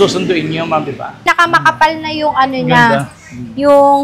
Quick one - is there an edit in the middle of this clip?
yes; 1 cut; at 1.2 s

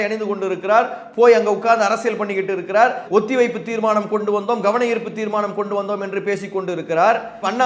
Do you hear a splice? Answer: no; 0 cuts

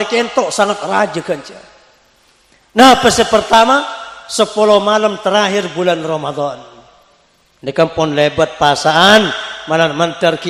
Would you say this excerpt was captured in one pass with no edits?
yes; 0 cuts

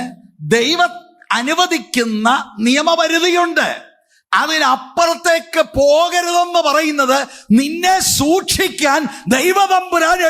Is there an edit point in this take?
no; 0 cuts

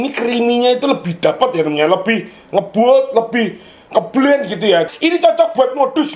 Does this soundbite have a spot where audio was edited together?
yes; 1 cut; at 4.9 s

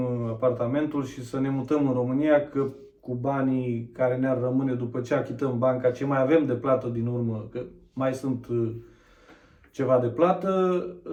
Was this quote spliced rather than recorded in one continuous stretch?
no; 0 cuts

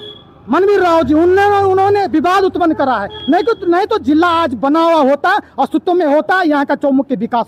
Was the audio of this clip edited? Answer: no; 0 cuts

